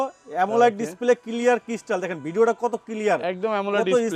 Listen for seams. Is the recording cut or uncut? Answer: uncut